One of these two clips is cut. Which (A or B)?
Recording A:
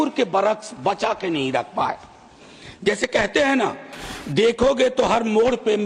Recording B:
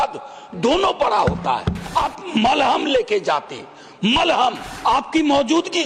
B